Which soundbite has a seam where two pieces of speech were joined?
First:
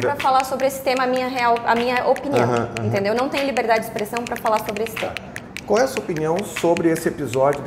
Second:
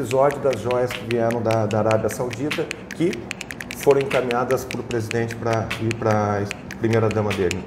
first; 1 cut; at 5.3 s

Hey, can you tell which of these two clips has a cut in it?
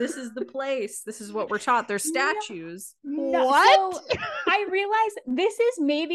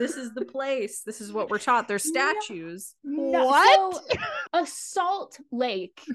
second; 1 cut; at 4.3 s

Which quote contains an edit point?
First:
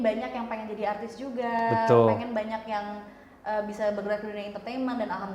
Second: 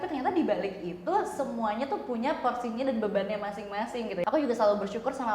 second; 1 cut; at 4.2 s

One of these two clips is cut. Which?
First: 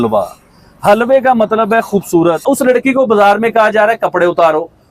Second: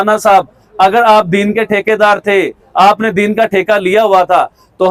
first; 1 cut; at 2.4 s

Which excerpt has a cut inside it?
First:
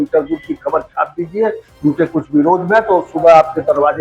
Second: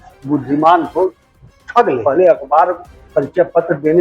second; 1 cut; at 2.0 s

